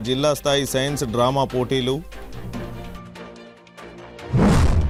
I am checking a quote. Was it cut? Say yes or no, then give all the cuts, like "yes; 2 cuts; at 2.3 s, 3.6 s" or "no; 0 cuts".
no; 0 cuts